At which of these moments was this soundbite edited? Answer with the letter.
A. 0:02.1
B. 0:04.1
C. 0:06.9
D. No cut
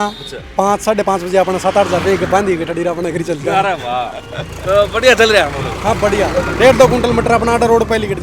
D